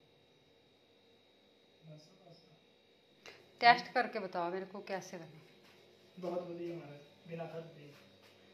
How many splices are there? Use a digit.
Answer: 1